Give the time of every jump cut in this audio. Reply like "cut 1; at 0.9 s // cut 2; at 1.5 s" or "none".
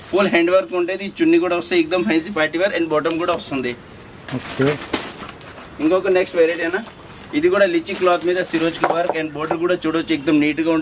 none

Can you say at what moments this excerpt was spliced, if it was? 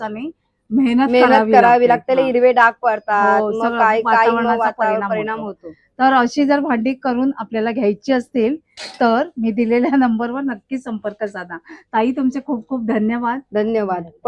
none

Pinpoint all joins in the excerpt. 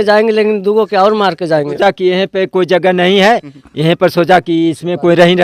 cut 1; at 1.8 s

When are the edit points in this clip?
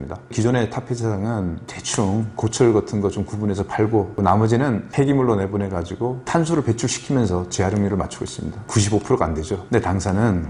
cut 1; at 4.2 s // cut 2; at 6.3 s

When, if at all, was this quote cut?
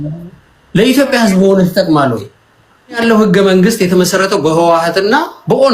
cut 1; at 3.0 s

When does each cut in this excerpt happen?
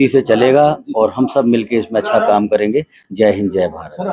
none

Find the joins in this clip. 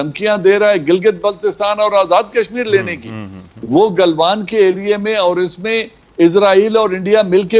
none

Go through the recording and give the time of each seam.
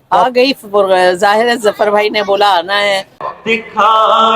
cut 1; at 3.2 s

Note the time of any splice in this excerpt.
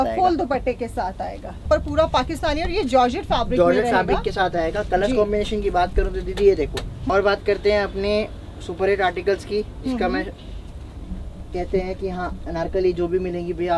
cut 1; at 1.5 s // cut 2; at 7.1 s

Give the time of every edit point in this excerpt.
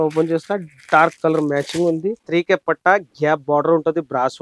cut 1; at 2.2 s

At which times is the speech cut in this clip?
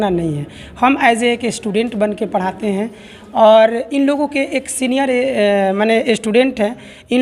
none

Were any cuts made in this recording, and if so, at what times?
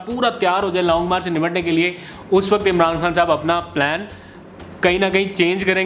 none

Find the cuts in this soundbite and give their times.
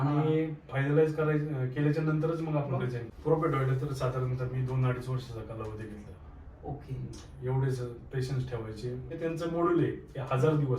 cut 1; at 3.0 s // cut 2; at 9.1 s

